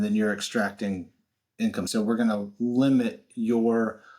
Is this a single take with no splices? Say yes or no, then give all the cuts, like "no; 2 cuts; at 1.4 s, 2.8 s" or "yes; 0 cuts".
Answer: no; 1 cut; at 1.9 s